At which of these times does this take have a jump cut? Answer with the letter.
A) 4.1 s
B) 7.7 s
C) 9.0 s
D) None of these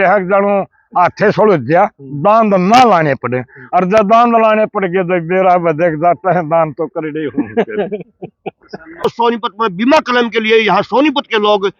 C